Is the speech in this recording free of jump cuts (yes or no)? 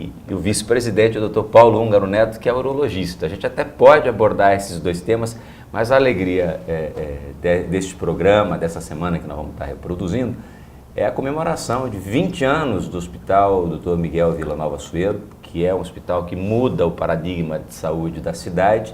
no